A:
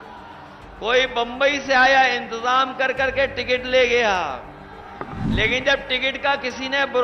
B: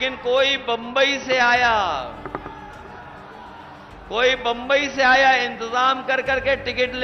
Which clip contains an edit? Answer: A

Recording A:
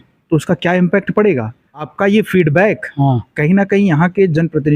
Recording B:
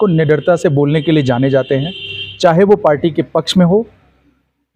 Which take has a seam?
A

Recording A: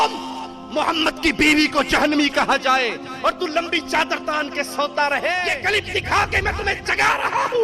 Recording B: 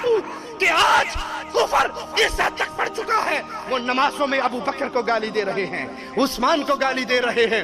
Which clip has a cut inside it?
A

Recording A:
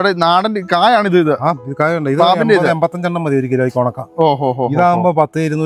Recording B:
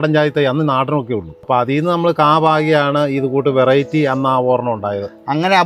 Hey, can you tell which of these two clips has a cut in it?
B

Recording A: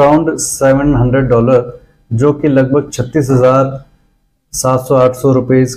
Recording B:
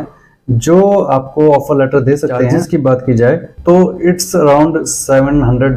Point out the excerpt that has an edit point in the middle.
B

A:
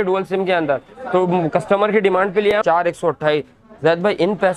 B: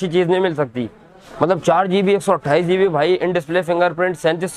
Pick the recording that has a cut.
A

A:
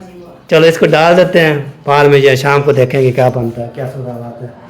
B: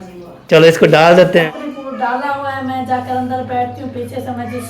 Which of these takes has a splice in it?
B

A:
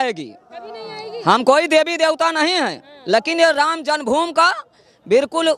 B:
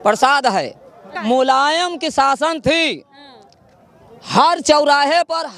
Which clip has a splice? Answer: B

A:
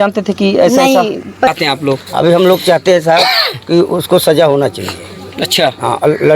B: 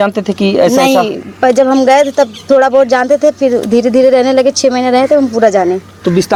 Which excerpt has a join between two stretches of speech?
A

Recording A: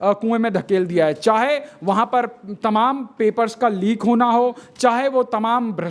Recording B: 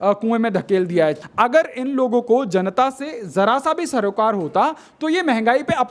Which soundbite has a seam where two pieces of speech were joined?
B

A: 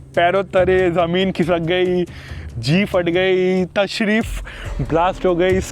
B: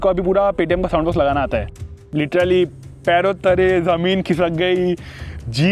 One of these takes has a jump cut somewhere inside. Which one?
B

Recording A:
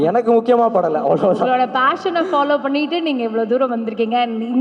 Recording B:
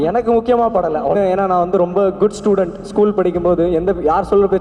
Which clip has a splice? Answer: B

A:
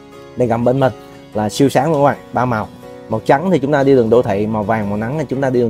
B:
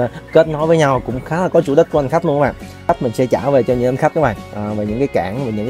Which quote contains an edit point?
B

